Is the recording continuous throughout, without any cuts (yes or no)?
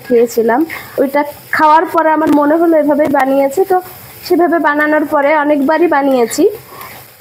yes